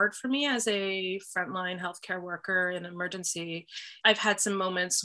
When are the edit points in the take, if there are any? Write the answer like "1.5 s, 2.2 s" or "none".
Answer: 3.8 s